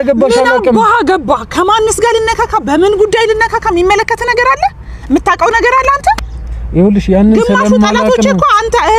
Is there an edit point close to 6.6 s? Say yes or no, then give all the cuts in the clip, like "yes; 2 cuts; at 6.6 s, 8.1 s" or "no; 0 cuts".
no; 0 cuts